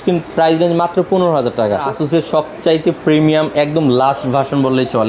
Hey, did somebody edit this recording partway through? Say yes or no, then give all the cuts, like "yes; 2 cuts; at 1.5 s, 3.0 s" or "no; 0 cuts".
yes; 1 cut; at 1.8 s